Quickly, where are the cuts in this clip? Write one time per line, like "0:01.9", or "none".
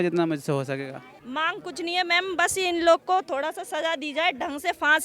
0:01.1